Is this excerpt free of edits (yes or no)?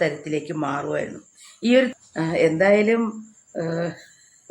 no